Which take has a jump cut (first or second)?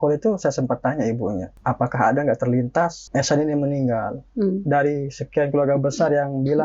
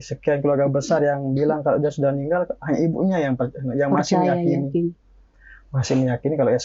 first